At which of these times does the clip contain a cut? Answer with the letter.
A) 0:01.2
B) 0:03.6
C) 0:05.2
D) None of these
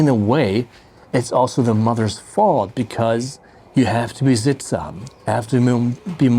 D